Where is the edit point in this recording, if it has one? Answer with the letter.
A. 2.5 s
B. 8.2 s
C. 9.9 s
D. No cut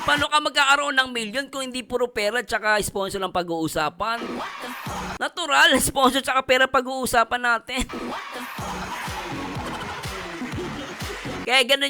B